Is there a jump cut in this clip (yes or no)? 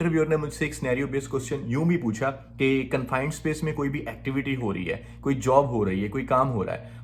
no